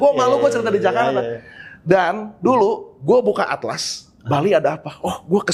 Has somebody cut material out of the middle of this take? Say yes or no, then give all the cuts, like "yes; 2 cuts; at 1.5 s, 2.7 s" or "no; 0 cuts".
no; 0 cuts